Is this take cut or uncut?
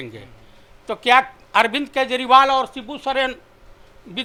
uncut